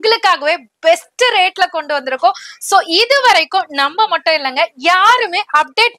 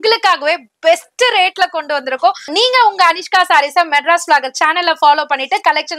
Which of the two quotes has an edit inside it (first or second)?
second